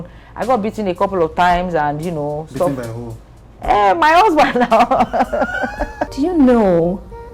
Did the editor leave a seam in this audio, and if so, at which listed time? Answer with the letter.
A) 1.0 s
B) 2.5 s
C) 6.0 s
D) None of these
C